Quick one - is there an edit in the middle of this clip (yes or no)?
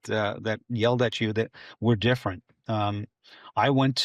no